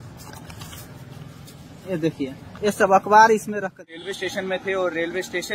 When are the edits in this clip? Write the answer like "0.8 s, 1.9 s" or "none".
3.9 s